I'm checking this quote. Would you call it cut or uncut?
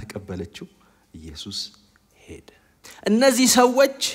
cut